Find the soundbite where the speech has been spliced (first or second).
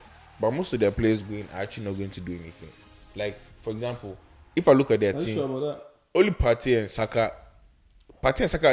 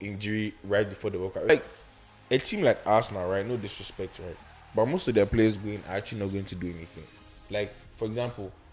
second